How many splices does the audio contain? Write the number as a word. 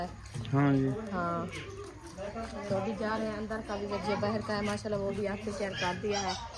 zero